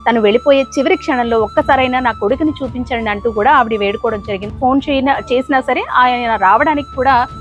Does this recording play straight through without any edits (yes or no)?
no